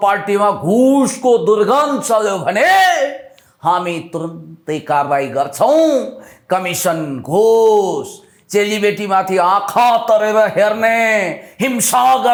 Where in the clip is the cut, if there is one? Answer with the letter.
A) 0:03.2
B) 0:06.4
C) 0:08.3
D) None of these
D